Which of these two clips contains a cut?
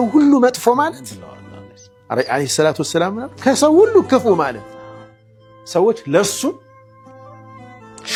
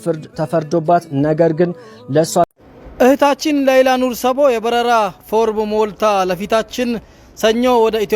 second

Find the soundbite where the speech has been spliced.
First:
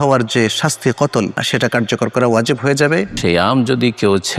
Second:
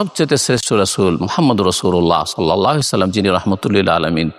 first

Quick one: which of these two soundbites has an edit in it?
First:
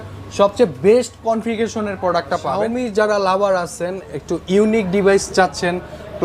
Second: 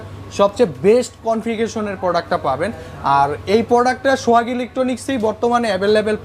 first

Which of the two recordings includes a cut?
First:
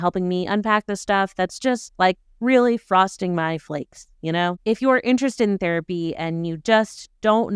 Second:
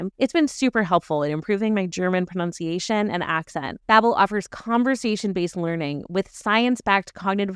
second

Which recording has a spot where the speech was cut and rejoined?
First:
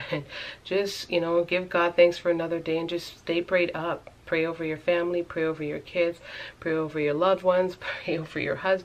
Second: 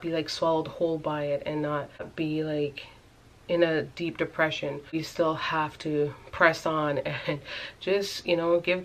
second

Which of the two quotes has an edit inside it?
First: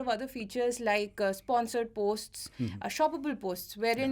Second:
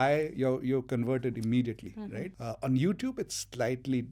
second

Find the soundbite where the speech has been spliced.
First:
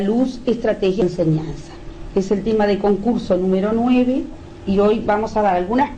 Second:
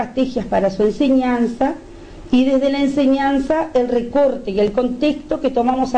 second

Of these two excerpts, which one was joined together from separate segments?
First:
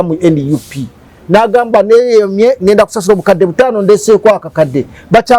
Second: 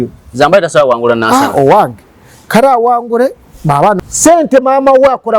second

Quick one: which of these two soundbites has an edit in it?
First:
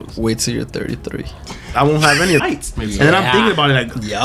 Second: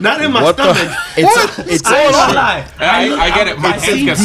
first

